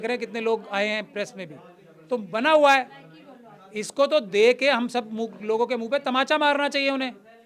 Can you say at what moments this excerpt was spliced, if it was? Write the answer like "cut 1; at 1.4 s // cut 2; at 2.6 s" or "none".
none